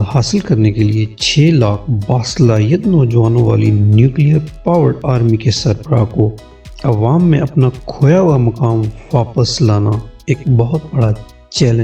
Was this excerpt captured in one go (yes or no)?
yes